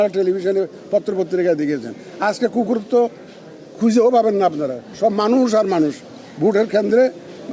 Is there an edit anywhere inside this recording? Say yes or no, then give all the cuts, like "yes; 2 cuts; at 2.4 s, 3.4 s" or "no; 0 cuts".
no; 0 cuts